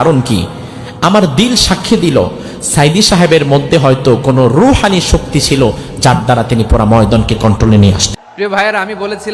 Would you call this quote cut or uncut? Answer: cut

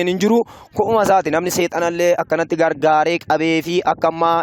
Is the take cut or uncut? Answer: uncut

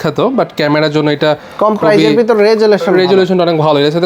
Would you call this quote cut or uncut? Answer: uncut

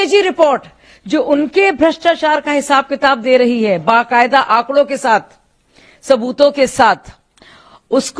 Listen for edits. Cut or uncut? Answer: uncut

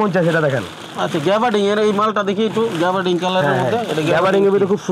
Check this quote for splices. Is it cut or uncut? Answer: uncut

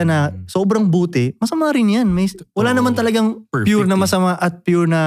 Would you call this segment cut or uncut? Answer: uncut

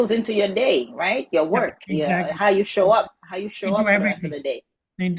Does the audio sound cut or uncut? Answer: uncut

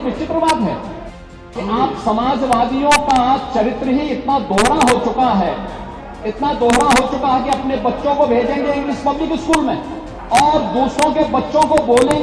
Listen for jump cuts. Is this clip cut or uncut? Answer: cut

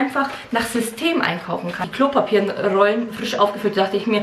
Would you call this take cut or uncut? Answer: cut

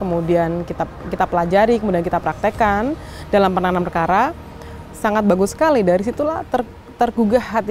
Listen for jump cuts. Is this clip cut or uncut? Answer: uncut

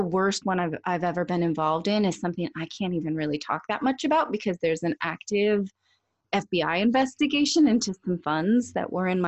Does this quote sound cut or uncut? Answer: uncut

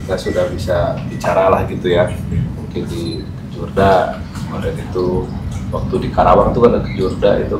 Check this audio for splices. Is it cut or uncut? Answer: uncut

